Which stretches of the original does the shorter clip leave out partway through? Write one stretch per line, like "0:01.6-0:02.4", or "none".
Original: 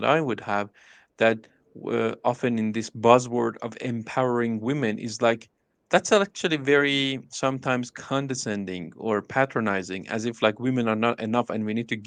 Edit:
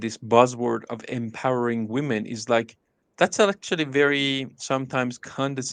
none